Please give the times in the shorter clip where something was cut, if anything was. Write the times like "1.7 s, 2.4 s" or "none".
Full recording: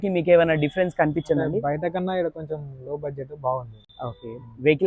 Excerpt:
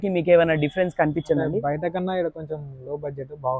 none